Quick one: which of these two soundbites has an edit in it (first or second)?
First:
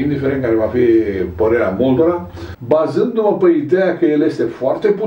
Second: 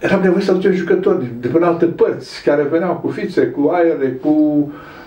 first